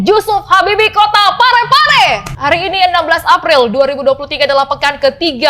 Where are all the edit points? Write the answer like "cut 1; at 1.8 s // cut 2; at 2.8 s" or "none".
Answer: cut 1; at 2.3 s

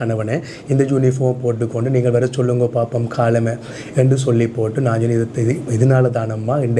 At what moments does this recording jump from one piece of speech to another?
none

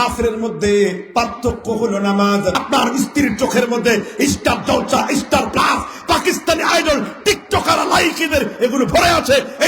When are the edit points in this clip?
cut 1; at 2.6 s

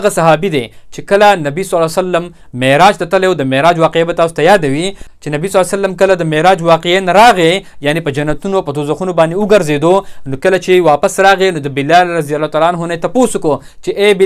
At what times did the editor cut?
none

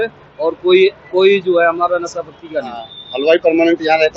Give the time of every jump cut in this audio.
cut 1; at 3.0 s

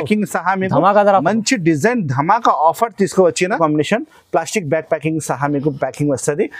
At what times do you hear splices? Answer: cut 1; at 3.6 s

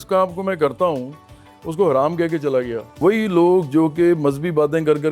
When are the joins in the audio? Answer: cut 1; at 3.0 s

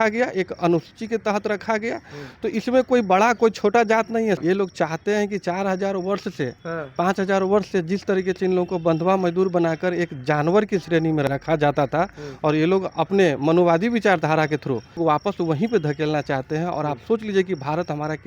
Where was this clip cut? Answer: cut 1; at 4.4 s // cut 2; at 11.3 s // cut 3; at 15.0 s

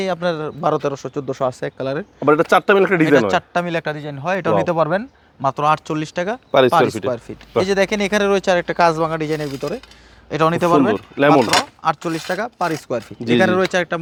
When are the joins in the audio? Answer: none

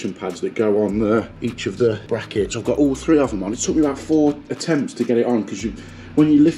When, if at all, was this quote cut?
cut 1; at 1.3 s // cut 2; at 2.0 s

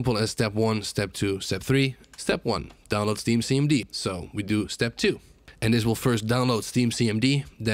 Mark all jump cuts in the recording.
cut 1; at 2.0 s // cut 2; at 3.9 s

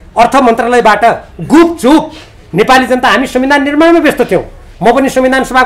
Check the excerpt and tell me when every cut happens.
none

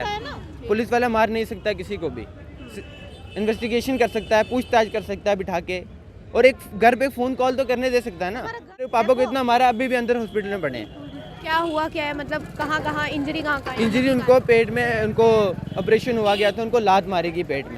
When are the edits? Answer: cut 1; at 8.9 s

